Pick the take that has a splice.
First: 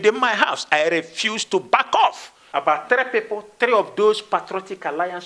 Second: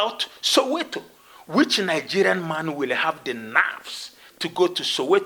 first; 1 cut; at 2.3 s

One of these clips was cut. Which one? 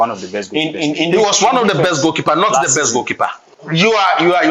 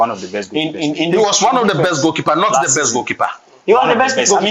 first; 1 cut; at 3.5 s

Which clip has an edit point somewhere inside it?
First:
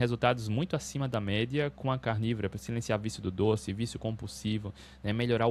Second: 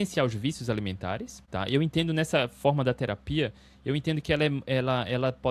second; 1 cut; at 1.4 s

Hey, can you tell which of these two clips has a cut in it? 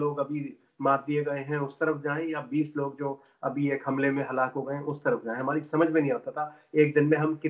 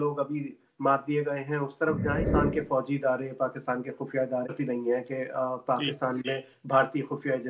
second; 2 cuts; at 2.2 s, 4.5 s

